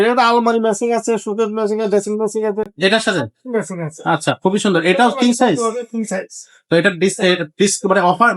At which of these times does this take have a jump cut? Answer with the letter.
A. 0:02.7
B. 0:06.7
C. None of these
C